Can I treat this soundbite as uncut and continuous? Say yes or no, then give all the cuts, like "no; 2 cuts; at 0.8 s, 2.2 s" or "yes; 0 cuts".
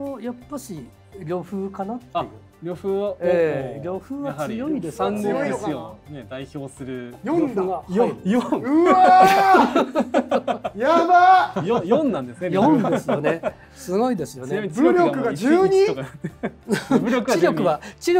yes; 0 cuts